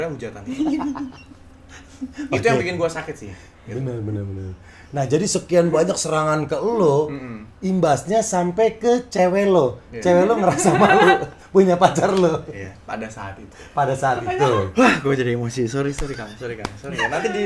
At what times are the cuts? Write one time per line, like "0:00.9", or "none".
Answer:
none